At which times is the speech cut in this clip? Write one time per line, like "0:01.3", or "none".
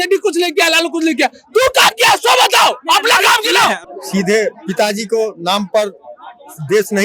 0:03.8